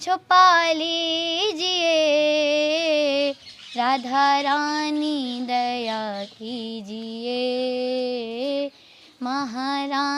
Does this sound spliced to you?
no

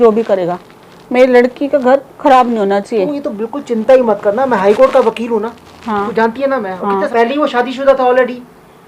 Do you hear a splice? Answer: yes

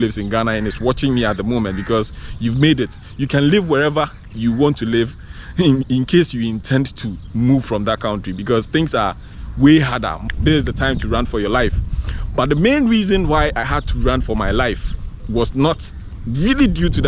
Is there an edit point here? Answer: yes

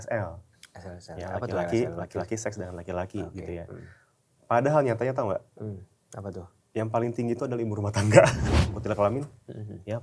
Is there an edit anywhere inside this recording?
yes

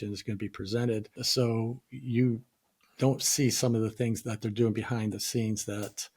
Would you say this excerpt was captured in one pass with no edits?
no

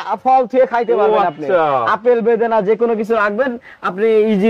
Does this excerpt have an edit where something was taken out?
no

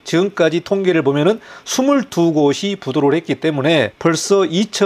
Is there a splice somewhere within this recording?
yes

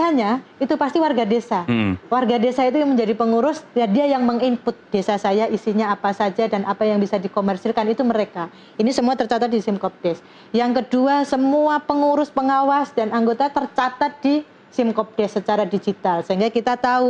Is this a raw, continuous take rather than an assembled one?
yes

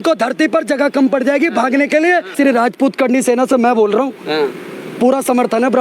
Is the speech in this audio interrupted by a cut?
yes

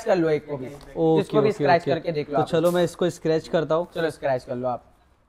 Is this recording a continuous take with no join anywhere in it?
yes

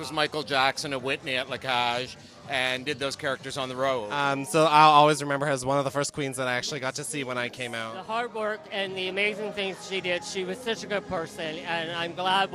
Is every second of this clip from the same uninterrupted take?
no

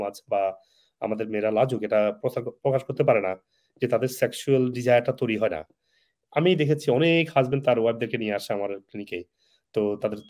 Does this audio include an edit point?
no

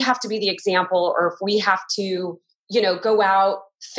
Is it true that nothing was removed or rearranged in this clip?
yes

